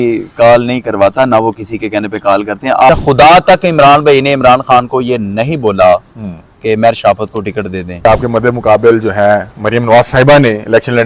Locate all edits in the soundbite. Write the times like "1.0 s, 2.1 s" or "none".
2.9 s, 8.0 s

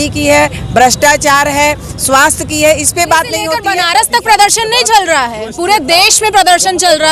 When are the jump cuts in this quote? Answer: 3.6 s

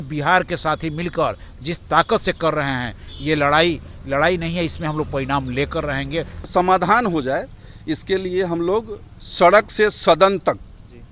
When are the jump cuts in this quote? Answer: 6.5 s

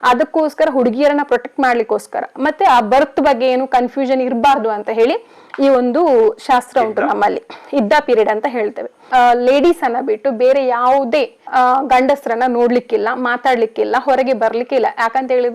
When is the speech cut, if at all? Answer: 8.9 s

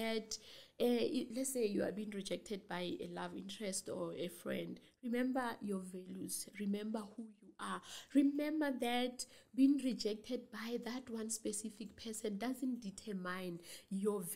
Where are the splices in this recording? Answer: none

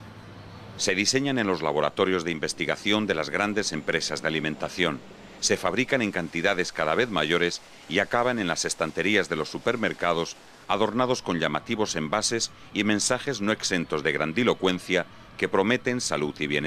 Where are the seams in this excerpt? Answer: none

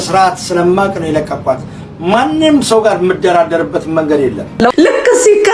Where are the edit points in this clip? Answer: 4.4 s

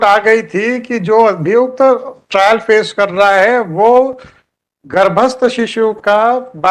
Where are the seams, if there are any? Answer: none

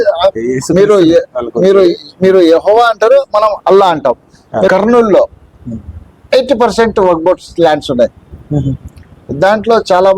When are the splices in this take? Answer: 4.7 s

